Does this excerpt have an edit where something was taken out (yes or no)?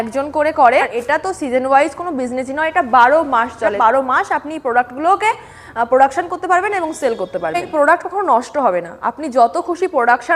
yes